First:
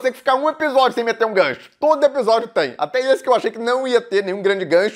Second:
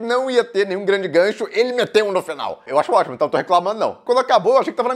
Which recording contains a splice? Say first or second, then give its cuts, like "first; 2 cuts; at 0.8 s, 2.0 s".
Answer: second; 2 cuts; at 2.7 s, 4.0 s